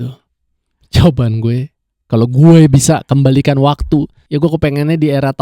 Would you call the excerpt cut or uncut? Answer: cut